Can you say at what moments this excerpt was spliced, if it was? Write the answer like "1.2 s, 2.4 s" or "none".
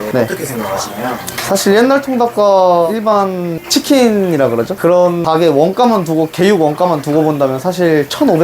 2.9 s, 4.7 s